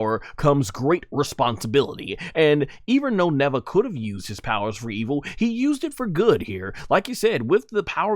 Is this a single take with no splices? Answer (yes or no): yes